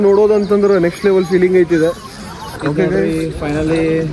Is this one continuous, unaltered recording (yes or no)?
no